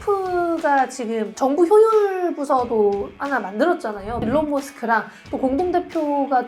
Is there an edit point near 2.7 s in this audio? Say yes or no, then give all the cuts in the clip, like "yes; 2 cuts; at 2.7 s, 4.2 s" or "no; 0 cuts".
no; 2 cuts; at 1.3 s, 4.2 s